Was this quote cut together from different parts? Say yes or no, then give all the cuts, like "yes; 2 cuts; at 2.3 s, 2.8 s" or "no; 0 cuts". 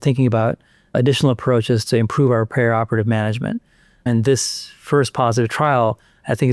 no; 0 cuts